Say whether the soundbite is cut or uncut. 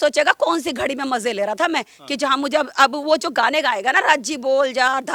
uncut